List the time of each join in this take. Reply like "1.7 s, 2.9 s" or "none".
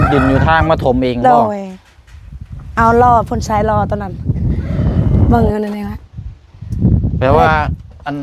5.3 s

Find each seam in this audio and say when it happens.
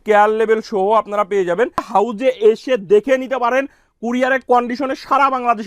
1.9 s

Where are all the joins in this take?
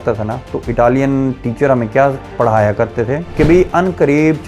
none

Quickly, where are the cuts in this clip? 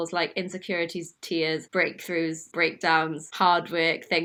none

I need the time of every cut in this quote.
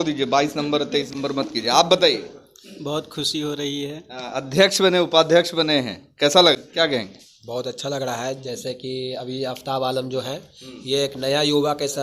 1.1 s, 6.6 s

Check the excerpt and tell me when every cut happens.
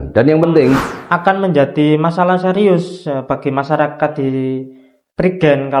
0.9 s

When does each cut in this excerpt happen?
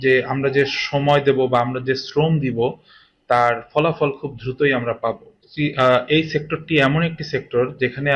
5.4 s

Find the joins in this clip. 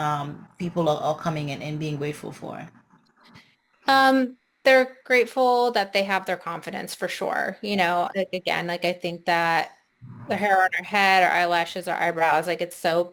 none

